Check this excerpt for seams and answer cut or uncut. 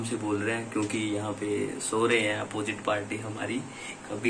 uncut